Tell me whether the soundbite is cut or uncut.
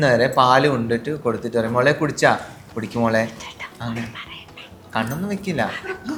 uncut